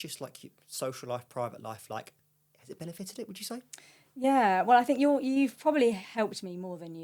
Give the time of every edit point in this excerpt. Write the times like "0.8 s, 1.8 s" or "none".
none